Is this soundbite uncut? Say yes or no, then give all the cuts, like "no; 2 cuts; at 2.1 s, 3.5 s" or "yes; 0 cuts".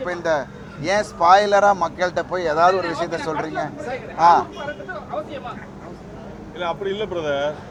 yes; 0 cuts